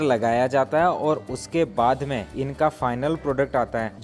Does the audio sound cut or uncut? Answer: cut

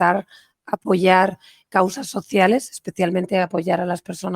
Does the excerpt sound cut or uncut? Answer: cut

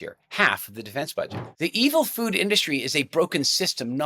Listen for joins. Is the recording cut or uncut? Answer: cut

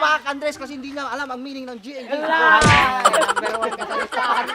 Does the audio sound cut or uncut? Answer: uncut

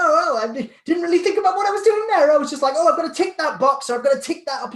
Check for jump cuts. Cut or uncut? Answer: uncut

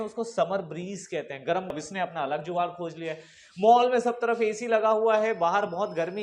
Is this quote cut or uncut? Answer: cut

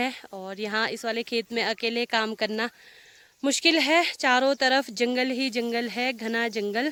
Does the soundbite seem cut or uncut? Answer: uncut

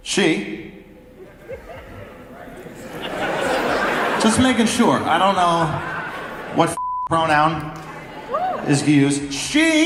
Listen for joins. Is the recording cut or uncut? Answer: uncut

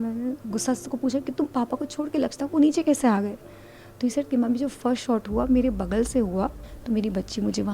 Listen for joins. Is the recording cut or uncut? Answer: cut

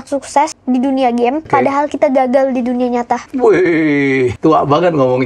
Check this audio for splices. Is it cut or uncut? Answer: cut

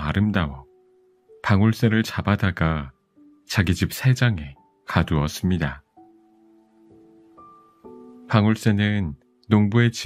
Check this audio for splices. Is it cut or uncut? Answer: uncut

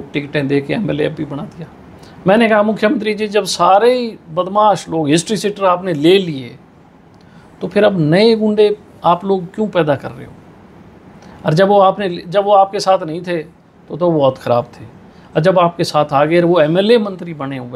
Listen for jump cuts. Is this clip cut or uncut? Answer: uncut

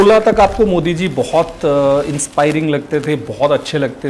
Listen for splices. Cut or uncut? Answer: uncut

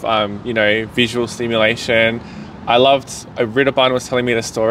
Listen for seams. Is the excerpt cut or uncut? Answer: uncut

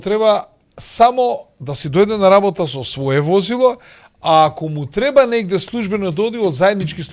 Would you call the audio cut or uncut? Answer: uncut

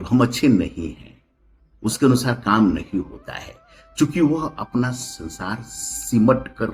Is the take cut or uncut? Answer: uncut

